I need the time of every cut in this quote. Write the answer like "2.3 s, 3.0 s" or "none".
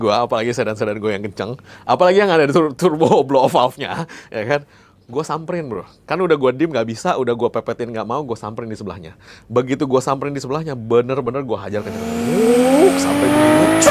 none